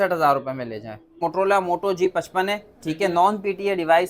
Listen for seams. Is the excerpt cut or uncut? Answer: cut